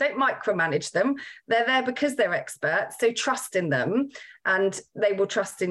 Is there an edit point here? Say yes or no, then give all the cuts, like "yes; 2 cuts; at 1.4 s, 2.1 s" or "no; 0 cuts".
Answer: no; 0 cuts